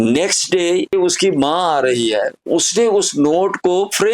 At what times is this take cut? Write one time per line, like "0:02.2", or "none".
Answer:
0:00.9